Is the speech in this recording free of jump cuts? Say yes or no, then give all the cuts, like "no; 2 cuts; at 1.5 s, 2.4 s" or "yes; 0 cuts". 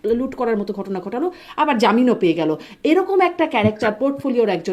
yes; 0 cuts